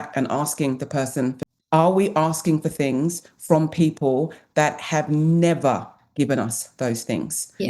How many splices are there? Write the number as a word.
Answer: one